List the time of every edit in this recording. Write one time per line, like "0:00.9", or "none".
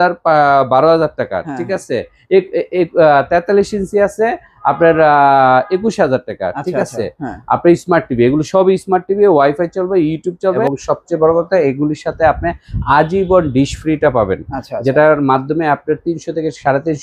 0:10.6